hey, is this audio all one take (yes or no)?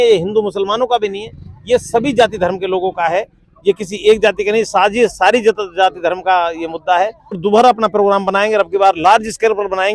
no